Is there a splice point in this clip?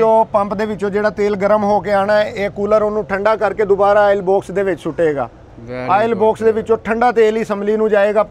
no; 0 cuts

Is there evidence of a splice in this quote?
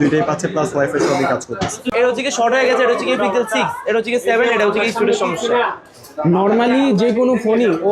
yes; 1 cut; at 1.9 s

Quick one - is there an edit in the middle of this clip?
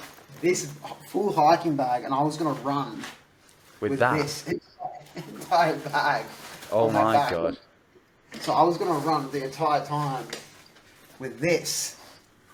no; 0 cuts

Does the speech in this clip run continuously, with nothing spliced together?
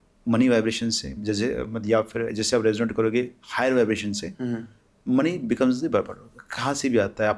yes; 0 cuts

